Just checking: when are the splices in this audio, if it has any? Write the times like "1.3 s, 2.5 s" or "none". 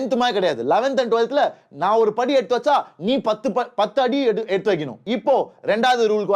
5.0 s